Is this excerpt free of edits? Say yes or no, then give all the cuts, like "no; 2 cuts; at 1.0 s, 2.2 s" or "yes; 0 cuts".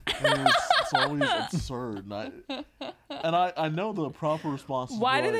yes; 0 cuts